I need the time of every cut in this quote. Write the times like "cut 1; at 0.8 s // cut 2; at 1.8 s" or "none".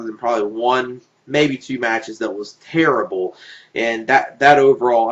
cut 1; at 3.1 s